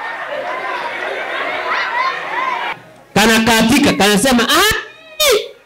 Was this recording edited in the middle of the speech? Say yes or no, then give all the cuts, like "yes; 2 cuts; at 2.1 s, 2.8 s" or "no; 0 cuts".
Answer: yes; 1 cut; at 2.7 s